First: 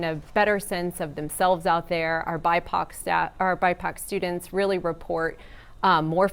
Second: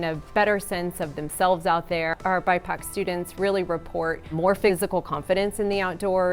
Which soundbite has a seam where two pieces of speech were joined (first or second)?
second